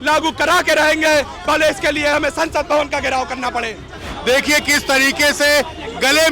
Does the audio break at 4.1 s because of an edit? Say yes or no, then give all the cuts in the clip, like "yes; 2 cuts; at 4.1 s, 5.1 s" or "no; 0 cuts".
yes; 1 cut; at 4.1 s